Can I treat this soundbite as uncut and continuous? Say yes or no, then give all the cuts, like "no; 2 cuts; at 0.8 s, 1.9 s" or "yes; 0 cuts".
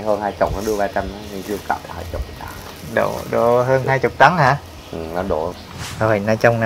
no; 1 cut; at 5.5 s